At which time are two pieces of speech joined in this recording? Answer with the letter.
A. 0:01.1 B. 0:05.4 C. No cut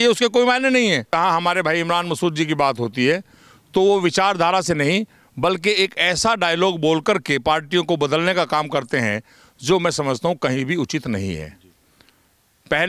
A